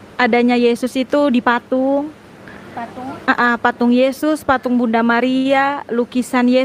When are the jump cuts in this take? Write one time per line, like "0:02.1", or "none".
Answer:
none